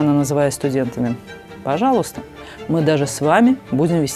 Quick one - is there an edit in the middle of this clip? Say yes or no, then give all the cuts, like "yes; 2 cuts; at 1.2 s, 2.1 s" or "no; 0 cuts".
no; 0 cuts